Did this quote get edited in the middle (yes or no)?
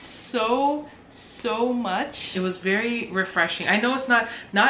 yes